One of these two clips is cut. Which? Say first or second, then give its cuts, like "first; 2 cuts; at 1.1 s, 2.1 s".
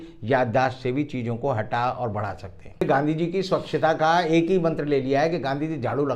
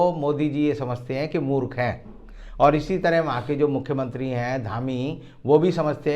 first; 1 cut; at 2.8 s